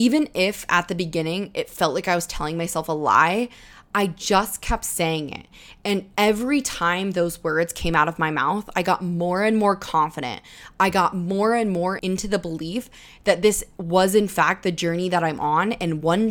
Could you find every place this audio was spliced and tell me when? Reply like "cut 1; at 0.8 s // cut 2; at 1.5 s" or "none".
cut 1; at 12.0 s